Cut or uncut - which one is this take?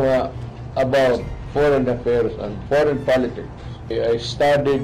cut